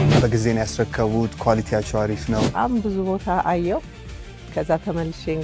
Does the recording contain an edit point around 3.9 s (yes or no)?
no